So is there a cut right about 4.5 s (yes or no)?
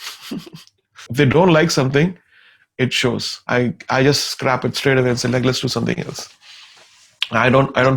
no